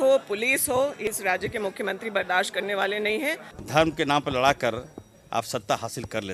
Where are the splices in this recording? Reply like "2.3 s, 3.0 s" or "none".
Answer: 1.1 s, 3.5 s